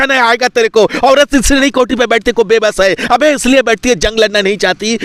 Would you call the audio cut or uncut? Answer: uncut